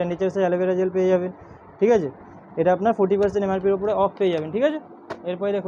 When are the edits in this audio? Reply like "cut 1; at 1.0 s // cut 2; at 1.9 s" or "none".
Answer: none